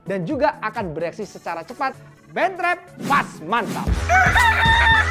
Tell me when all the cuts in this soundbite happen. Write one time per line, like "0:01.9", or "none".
0:03.9